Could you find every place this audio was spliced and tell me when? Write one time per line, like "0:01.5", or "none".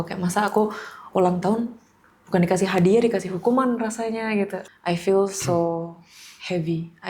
0:04.7